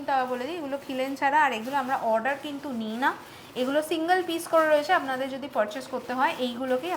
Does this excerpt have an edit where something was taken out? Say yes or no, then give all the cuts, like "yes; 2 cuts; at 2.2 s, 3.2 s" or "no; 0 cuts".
no; 0 cuts